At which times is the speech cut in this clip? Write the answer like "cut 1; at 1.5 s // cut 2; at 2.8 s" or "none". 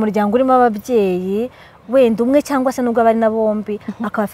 none